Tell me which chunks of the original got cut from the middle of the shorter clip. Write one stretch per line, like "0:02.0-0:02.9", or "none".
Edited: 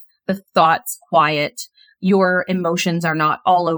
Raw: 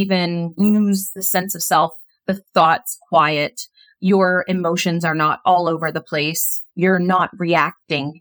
none